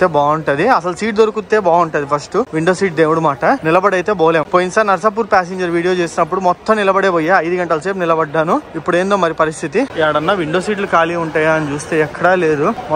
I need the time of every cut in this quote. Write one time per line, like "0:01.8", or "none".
none